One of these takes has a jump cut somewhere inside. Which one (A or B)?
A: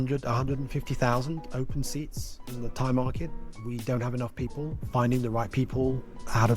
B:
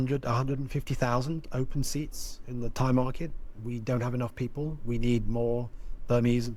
A